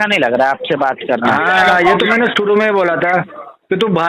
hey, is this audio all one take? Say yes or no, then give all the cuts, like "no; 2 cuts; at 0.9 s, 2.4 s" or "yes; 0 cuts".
yes; 0 cuts